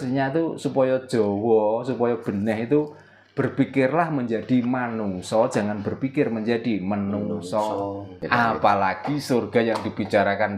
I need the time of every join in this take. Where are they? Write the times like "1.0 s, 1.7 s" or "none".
8.2 s